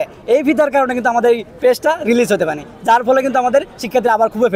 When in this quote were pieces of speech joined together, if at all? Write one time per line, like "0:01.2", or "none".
none